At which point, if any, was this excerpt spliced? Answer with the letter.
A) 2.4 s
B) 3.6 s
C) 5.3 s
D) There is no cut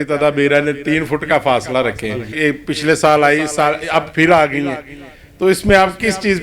A